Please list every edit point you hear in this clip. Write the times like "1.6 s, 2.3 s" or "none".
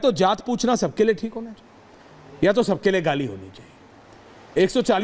none